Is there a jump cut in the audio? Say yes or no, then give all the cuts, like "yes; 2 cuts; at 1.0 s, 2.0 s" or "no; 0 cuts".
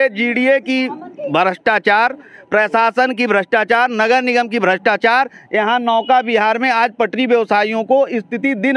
no; 0 cuts